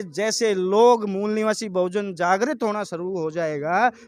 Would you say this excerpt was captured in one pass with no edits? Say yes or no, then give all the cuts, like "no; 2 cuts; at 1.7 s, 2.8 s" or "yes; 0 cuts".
yes; 0 cuts